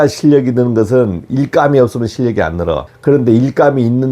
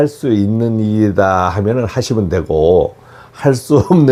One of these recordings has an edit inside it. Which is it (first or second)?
first